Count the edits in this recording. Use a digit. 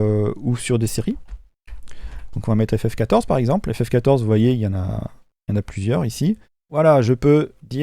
1